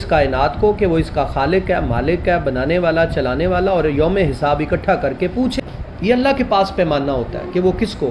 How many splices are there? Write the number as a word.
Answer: one